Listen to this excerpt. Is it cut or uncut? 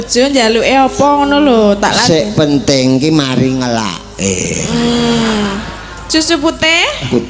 uncut